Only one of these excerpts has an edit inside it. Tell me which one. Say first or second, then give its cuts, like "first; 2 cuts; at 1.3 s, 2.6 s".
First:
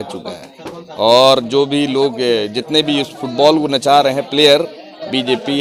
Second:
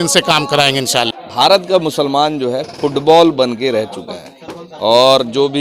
second; 1 cut; at 1.2 s